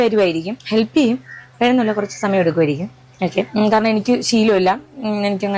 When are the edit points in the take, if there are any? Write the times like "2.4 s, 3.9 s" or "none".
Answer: 2.4 s